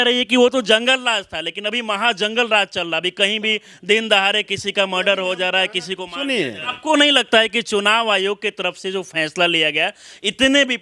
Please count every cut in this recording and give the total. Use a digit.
1